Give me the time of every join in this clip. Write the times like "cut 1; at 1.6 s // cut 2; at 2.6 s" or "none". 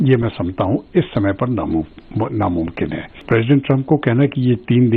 cut 1; at 3.2 s